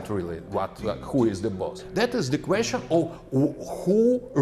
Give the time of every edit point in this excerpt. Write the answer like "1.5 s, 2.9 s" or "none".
1.8 s